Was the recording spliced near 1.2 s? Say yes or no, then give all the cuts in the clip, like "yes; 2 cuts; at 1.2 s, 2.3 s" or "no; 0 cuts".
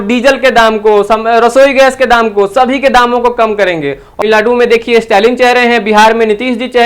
no; 1 cut; at 4.2 s